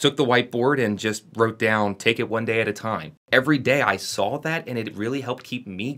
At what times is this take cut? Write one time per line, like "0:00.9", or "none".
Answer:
0:03.2